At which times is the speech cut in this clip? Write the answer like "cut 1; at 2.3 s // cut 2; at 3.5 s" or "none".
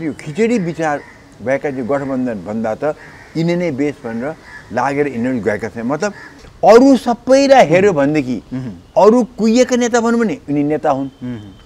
cut 1; at 6.3 s